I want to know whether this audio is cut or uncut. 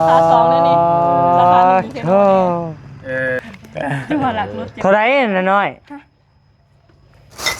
cut